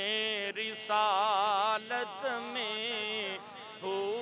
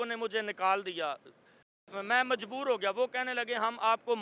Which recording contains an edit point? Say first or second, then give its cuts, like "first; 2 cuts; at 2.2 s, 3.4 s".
second; 1 cut; at 1.8 s